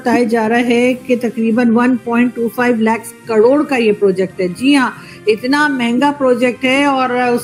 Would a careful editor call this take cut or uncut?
uncut